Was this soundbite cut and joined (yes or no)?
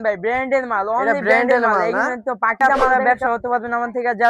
yes